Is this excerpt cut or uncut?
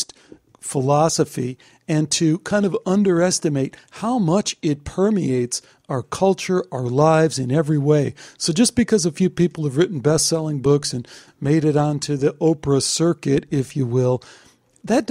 uncut